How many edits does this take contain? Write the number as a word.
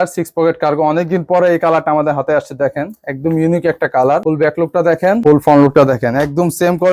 zero